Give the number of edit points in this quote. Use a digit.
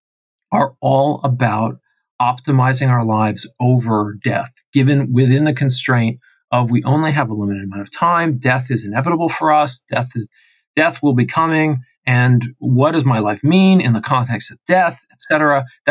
0